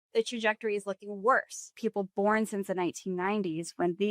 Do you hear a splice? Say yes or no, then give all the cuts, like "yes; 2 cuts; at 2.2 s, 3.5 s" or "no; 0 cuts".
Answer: yes; 1 cut; at 1.7 s